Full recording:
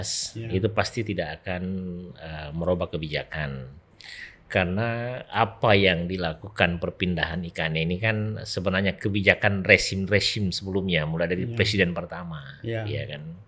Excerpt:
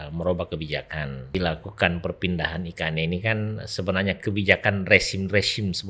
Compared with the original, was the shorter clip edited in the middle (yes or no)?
yes